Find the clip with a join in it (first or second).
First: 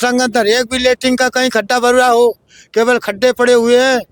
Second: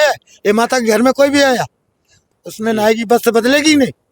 second